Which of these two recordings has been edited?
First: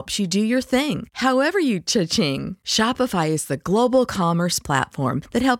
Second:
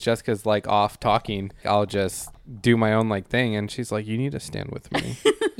second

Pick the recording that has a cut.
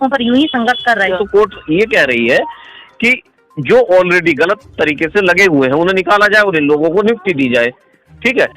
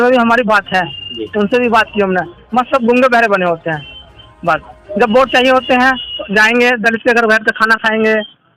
first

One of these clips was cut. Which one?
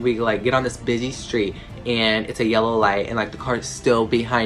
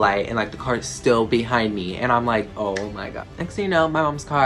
second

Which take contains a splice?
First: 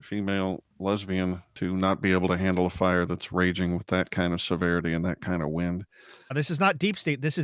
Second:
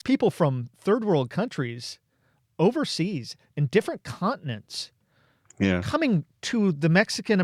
first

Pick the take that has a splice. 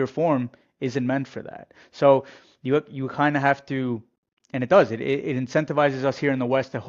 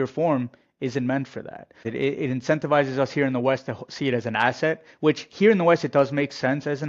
second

